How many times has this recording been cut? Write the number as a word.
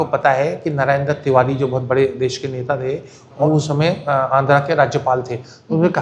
one